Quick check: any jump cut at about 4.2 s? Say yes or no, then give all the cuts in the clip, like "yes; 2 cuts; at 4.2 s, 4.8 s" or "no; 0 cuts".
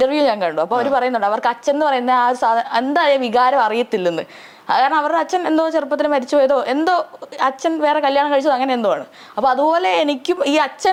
no; 0 cuts